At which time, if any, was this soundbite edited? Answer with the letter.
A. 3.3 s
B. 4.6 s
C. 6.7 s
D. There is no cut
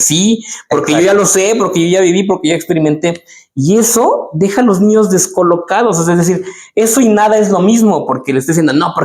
D